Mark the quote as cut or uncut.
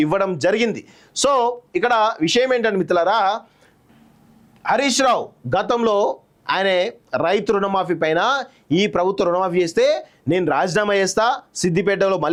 uncut